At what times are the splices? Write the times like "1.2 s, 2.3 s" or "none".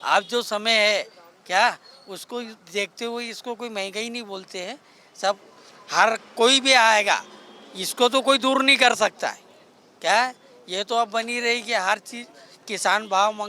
none